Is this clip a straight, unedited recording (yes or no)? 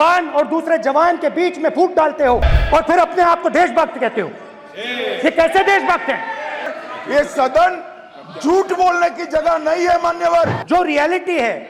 no